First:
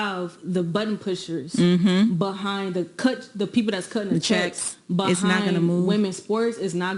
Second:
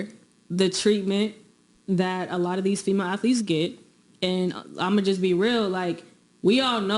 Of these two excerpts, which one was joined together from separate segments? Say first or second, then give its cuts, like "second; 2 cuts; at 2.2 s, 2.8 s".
second; 2 cuts; at 2.1 s, 3.0 s